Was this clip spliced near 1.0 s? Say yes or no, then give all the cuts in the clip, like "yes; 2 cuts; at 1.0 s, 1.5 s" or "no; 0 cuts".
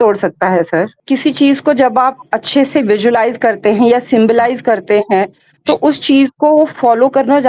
yes; 1 cut; at 1.0 s